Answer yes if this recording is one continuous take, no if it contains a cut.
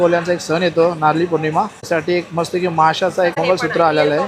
no